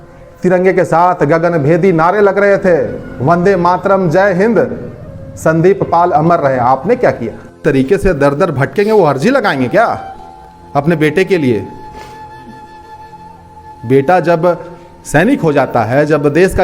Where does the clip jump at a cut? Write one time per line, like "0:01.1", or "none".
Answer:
0:07.6